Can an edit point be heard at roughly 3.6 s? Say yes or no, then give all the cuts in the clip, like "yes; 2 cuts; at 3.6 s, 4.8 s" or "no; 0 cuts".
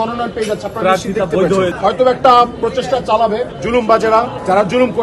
no; 1 cut; at 1.8 s